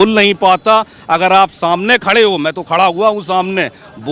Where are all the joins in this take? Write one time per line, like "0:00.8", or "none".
none